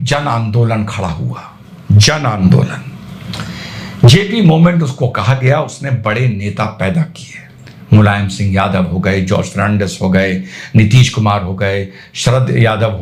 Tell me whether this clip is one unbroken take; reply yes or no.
yes